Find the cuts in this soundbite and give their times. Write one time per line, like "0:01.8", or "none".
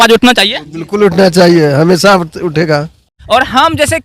0:03.1